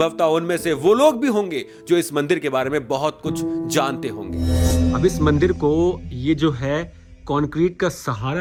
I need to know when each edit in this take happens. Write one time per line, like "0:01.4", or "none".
none